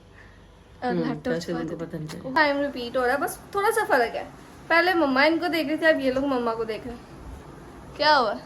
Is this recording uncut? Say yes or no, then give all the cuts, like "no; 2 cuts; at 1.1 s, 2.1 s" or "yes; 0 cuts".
no; 1 cut; at 2.3 s